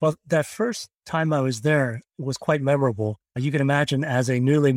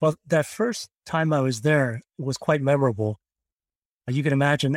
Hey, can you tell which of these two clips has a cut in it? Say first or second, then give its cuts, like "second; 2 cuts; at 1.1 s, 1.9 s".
first; 1 cut; at 3.3 s